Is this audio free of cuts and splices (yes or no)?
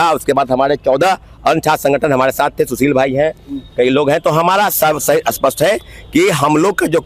yes